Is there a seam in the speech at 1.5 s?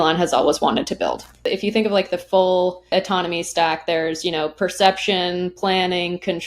yes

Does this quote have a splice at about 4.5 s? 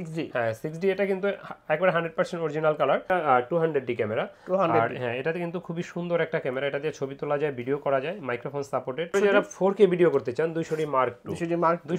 no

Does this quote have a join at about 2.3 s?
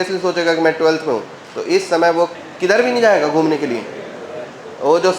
yes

